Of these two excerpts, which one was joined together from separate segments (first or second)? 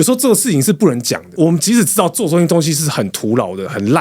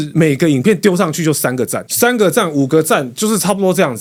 first